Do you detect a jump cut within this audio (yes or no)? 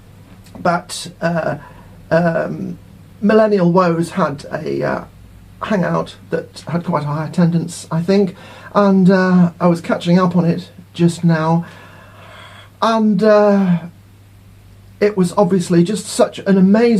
no